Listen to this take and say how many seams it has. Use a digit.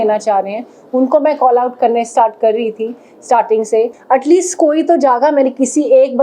1